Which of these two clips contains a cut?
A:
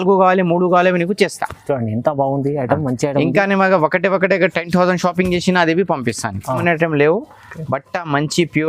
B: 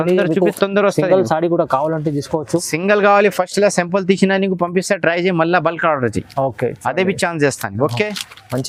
A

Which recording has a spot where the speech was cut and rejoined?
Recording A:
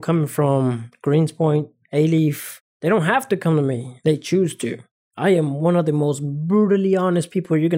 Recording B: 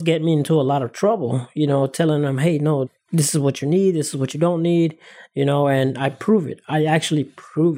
A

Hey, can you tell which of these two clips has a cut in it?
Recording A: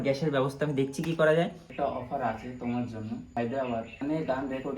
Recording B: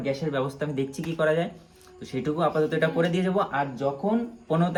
A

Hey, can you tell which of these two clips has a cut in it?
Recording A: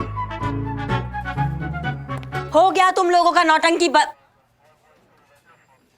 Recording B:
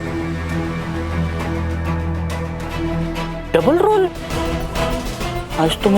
B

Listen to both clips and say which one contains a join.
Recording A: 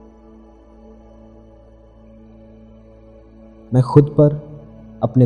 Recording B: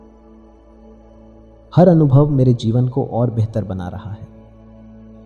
A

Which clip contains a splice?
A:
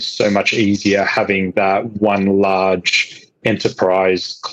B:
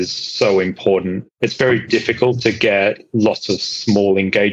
B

